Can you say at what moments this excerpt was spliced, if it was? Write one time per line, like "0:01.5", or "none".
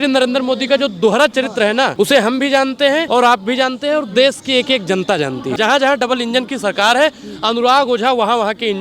0:01.9
0:03.1
0:05.6